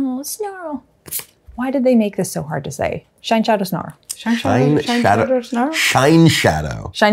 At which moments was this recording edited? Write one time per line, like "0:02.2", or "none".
none